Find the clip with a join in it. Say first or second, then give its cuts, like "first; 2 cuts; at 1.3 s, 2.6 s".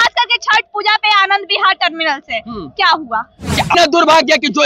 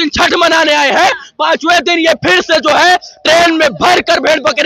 first; 1 cut; at 3.7 s